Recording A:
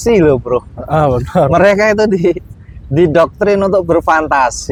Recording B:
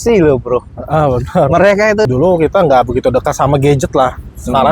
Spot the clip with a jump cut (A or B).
B